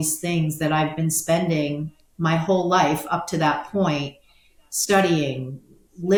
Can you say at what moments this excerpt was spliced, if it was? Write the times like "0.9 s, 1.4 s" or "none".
none